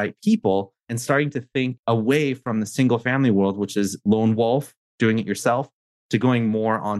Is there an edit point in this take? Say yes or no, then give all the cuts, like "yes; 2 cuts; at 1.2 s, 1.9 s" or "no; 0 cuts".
yes; 2 cuts; at 0.9 s, 1.8 s